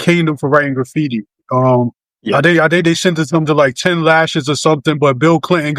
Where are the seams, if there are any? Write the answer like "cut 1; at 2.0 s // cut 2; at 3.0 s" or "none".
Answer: cut 1; at 2.1 s